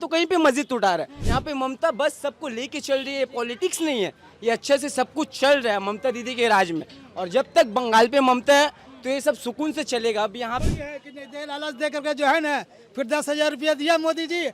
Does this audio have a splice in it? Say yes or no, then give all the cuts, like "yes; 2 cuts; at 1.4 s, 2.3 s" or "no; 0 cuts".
yes; 2 cuts; at 1.2 s, 10.6 s